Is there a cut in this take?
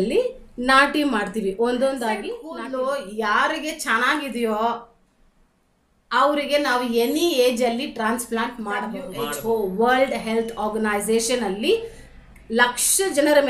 yes; 2 cuts; at 2.4 s, 9.1 s

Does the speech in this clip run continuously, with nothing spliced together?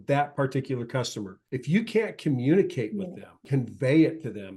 no; 2 cuts; at 1.4 s, 3.4 s

